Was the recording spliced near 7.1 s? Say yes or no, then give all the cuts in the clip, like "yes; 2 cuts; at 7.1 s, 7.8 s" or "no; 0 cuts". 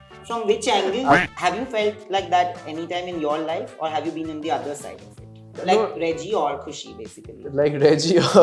no; 2 cuts; at 1.2 s, 5.6 s